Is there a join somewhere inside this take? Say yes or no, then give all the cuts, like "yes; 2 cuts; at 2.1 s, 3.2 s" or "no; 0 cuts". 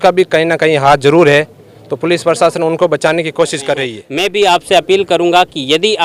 yes; 1 cut; at 4.0 s